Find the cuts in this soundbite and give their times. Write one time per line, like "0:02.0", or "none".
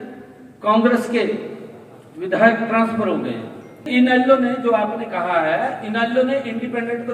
0:03.9